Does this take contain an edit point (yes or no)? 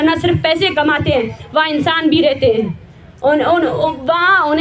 no